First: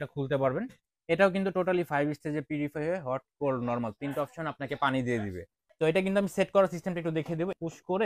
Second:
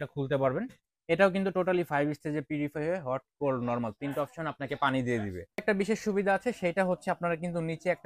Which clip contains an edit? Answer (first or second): second